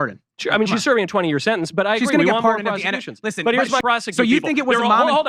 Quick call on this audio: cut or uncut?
cut